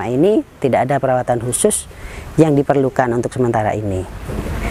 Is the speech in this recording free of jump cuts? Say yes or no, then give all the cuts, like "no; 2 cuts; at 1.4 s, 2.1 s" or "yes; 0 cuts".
yes; 0 cuts